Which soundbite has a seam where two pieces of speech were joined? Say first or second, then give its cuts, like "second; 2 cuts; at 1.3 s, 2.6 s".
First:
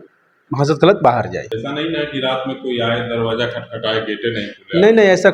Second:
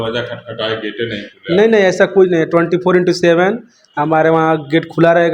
first; 1 cut; at 1.5 s